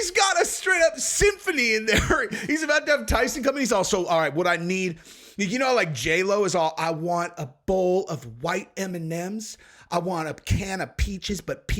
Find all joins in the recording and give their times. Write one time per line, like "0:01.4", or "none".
none